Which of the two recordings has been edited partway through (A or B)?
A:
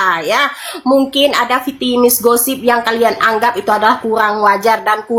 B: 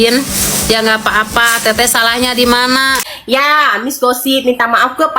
B